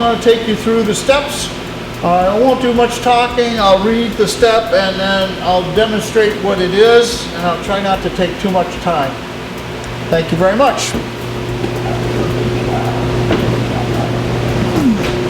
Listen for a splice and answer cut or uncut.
uncut